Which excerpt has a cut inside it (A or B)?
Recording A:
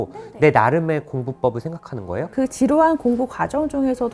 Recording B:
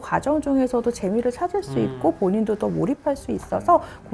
A